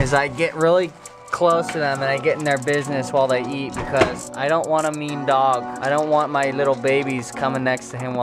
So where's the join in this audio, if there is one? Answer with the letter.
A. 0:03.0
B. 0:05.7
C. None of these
B